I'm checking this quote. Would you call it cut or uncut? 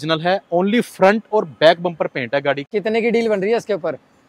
cut